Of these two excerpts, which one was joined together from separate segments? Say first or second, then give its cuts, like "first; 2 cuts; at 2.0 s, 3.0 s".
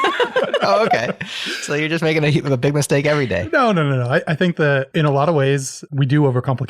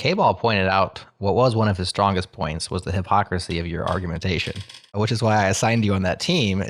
first; 2 cuts; at 4.9 s, 5.8 s